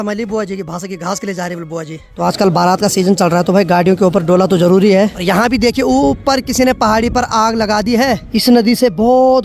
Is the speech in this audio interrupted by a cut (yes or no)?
yes